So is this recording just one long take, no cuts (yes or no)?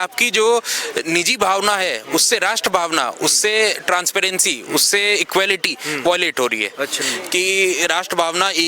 no